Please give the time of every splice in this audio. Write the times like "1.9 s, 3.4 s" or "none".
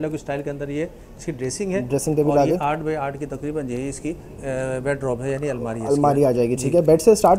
none